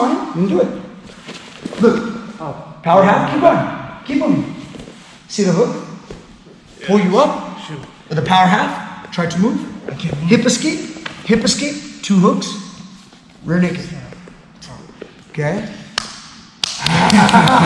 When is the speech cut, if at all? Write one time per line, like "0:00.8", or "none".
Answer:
none

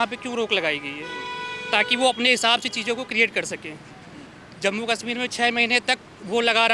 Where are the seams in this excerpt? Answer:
none

